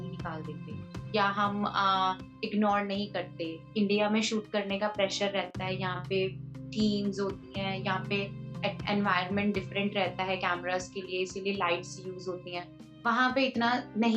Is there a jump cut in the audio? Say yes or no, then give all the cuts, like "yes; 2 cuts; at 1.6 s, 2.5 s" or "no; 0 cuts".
yes; 1 cut; at 3.7 s